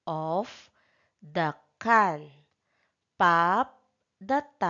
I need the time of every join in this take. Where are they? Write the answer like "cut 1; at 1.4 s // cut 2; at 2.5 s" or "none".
cut 1; at 3.3 s